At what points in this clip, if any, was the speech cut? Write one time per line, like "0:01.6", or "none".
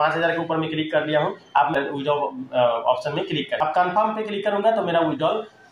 0:01.7
0:03.6